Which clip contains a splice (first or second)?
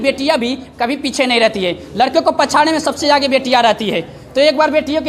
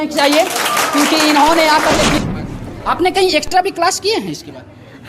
second